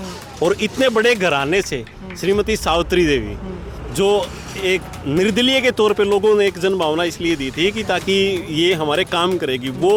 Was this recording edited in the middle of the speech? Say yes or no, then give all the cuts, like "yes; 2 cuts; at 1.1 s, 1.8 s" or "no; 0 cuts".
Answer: no; 0 cuts